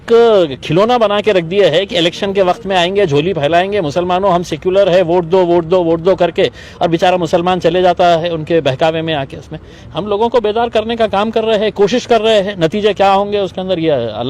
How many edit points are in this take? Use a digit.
0